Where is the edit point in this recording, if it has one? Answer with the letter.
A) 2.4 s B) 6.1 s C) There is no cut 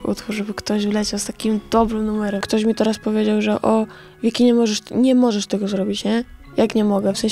A